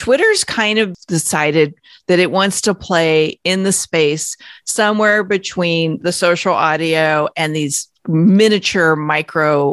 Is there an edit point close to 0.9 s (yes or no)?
yes